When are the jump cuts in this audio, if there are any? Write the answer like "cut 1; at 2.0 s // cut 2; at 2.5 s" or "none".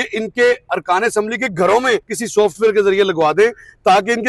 cut 1; at 2.2 s